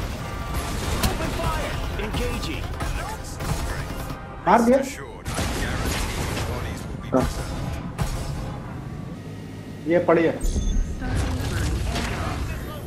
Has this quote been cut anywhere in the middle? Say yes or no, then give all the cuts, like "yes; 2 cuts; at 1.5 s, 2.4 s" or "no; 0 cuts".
yes; 1 cut; at 9.2 s